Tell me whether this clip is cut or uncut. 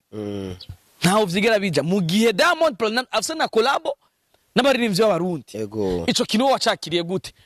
uncut